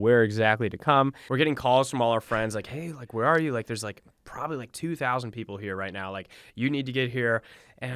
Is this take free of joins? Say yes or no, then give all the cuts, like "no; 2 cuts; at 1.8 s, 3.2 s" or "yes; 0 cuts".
no; 1 cut; at 1.2 s